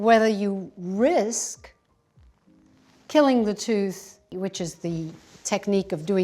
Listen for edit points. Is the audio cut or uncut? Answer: cut